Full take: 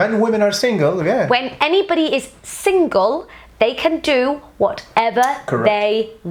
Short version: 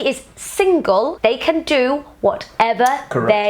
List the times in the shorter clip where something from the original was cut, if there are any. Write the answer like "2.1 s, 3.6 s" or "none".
1.1 s

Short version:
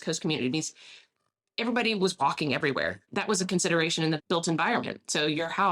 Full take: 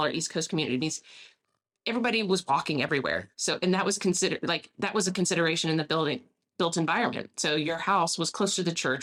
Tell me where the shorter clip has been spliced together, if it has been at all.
3.0 s, 4.2 s

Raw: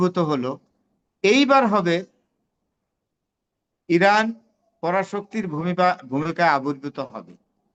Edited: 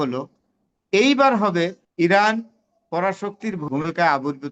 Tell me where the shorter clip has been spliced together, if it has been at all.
1.8 s, 3.6 s

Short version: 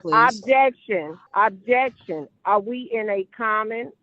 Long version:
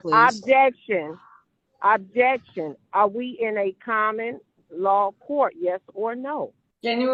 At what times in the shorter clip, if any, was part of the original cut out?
1.2 s

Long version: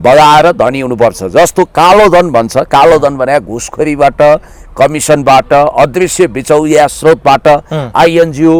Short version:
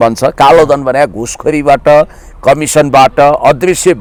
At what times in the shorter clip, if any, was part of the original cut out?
none

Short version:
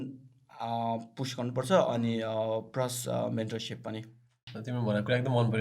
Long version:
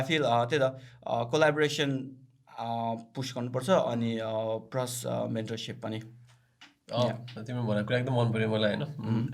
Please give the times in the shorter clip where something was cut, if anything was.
4.5 s

